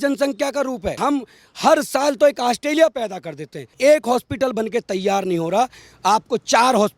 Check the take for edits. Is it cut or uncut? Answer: cut